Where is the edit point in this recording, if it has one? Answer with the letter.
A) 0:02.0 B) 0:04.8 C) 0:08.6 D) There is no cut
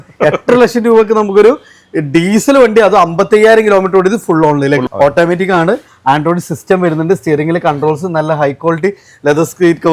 B